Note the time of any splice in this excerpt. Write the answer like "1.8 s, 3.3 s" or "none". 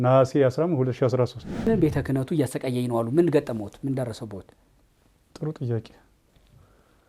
1.7 s